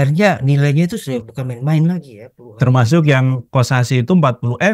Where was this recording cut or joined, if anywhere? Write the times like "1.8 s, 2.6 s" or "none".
none